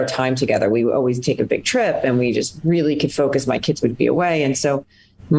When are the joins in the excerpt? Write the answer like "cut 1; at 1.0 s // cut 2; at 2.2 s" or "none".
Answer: none